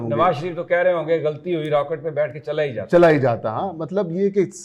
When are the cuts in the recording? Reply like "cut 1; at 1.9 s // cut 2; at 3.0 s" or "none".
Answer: none